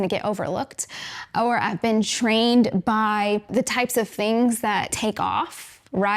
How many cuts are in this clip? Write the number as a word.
one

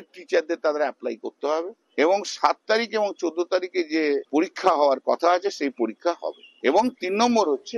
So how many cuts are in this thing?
zero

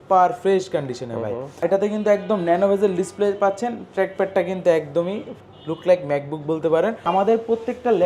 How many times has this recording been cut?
two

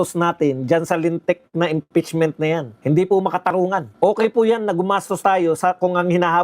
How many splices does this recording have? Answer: two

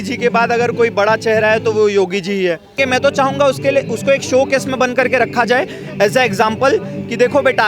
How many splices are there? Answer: one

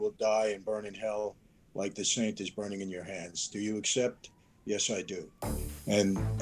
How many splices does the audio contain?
zero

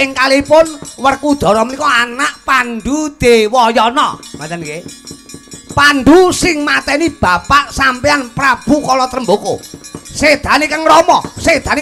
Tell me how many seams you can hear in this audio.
zero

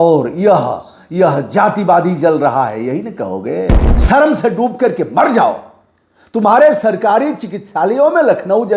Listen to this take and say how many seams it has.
one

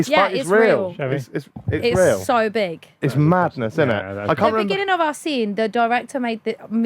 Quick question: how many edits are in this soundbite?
one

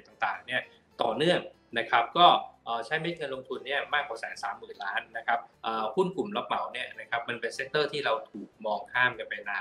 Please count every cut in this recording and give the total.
one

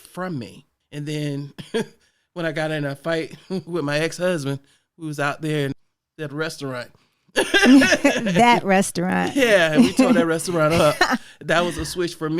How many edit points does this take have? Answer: one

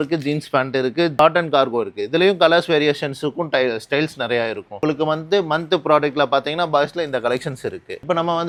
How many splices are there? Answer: zero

